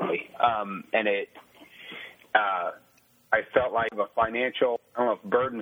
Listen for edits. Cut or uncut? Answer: cut